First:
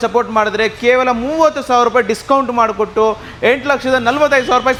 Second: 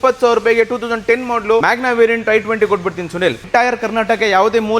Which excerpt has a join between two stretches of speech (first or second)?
second